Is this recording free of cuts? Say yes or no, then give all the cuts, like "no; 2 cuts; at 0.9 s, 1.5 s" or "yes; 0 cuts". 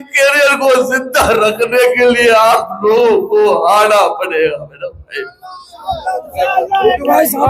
yes; 0 cuts